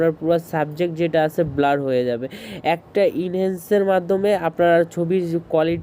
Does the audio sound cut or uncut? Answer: uncut